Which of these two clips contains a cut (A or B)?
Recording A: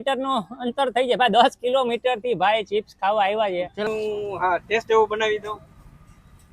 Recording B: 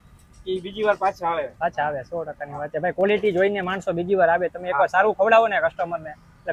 A